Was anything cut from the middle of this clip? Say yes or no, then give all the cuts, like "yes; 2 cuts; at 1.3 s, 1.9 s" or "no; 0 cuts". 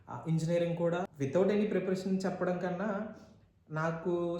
yes; 1 cut; at 1.0 s